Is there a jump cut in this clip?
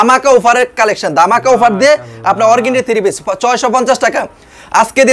no; 0 cuts

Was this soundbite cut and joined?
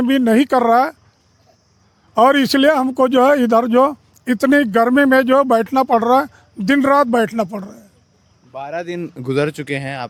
no; 0 cuts

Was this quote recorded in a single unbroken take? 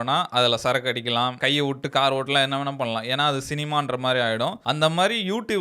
no; 2 cuts; at 1.4 s, 4.6 s

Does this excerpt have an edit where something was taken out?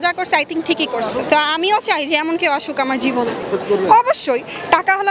no; 0 cuts

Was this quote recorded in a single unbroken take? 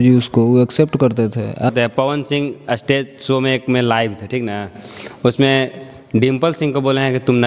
no; 1 cut; at 1.7 s

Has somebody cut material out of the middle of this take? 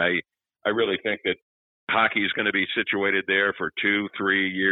no; 0 cuts

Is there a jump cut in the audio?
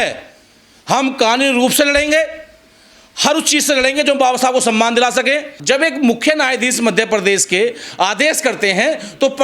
yes; 1 cut; at 5.6 s

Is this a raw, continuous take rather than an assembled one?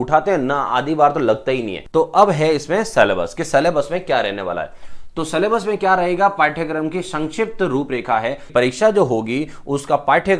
no; 2 cuts; at 1.8 s, 8.4 s

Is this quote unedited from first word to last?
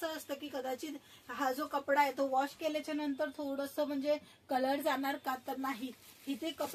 yes; 0 cuts

